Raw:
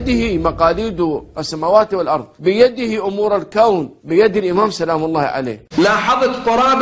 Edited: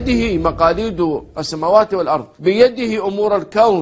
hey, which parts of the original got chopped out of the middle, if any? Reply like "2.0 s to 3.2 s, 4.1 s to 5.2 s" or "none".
none